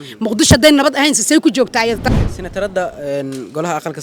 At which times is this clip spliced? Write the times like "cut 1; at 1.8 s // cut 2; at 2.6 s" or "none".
cut 1; at 2.0 s